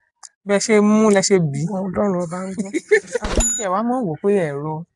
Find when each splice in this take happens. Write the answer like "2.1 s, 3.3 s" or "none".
3.5 s